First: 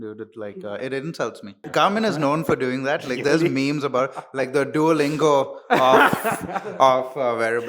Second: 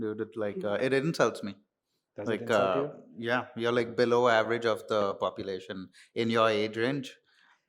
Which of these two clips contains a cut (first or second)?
first